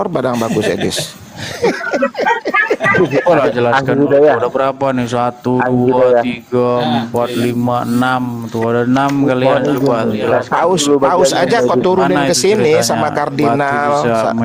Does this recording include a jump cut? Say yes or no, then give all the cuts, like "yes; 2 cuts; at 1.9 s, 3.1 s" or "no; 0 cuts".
no; 0 cuts